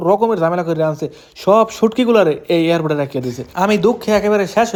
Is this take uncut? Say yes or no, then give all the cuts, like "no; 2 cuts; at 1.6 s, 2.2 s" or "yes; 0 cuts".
yes; 0 cuts